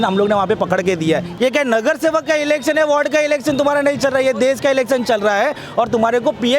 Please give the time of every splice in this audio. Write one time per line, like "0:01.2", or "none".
0:01.3